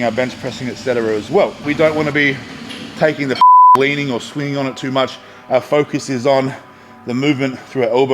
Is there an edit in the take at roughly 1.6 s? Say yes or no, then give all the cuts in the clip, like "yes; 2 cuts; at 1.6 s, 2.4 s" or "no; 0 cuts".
yes; 1 cut; at 1.6 s